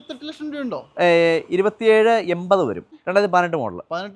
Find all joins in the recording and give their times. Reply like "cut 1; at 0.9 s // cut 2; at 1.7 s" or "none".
cut 1; at 2.9 s